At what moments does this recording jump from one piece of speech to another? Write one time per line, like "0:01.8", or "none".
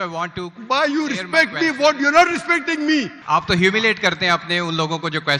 0:03.2